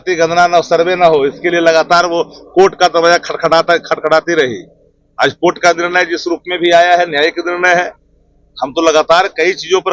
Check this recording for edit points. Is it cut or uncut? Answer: uncut